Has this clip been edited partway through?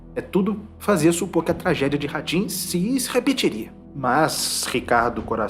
yes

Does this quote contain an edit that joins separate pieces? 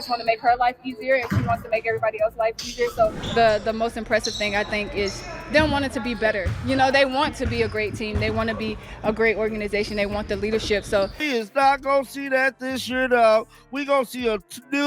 yes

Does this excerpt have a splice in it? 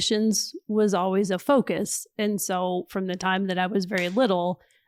no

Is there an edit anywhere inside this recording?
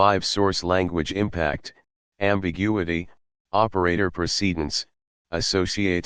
no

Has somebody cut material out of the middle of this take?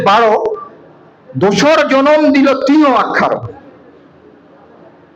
no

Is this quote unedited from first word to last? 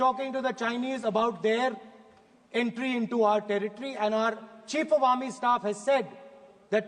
yes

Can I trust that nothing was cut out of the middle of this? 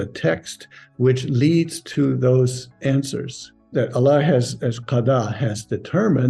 no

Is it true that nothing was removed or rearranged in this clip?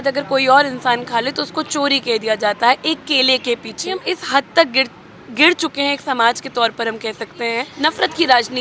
no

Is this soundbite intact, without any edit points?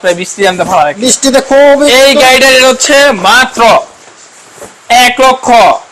yes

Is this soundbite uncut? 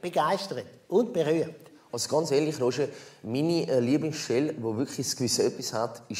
yes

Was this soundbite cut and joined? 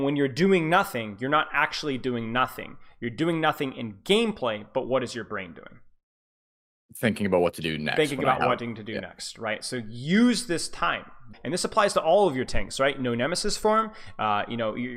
yes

